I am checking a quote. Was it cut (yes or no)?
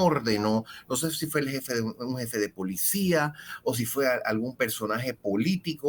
no